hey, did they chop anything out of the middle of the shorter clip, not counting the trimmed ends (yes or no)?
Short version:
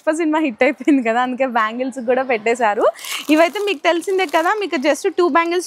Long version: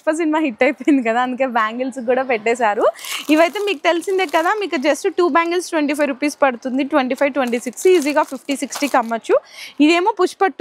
no